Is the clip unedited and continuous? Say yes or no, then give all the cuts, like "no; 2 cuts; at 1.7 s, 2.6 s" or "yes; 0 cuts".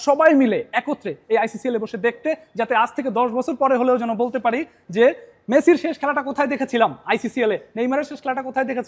yes; 0 cuts